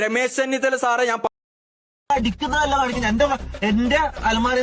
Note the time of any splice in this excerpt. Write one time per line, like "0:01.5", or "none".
0:01.3

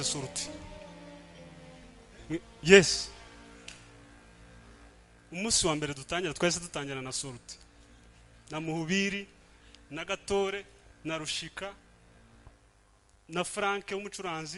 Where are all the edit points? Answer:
none

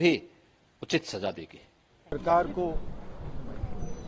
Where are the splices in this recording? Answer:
none

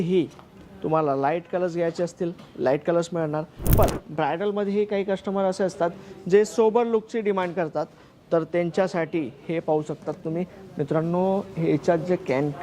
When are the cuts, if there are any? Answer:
0:03.7

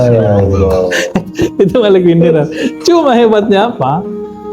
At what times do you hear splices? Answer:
none

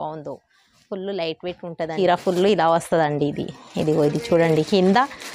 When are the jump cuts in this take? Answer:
0:01.9

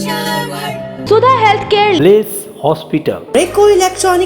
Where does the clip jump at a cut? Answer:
none

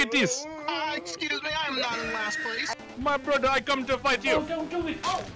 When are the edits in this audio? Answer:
0:02.8

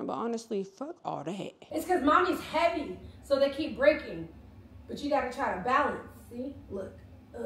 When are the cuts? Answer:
0:01.5

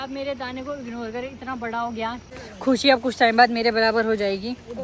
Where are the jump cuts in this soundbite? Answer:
0:02.2

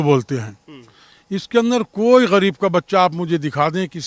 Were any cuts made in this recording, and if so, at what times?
none

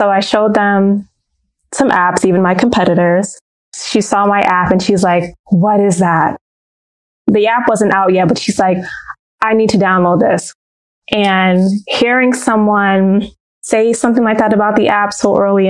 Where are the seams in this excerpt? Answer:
0:10.7

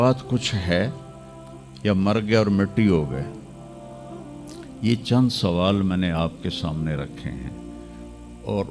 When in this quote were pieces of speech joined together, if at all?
none

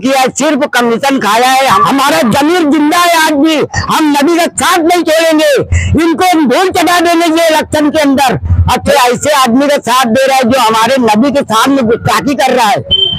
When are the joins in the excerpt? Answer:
0:01.8
0:08.9

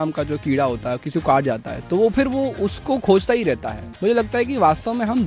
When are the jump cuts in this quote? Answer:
0:03.8

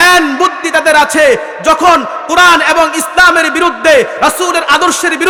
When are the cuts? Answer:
none

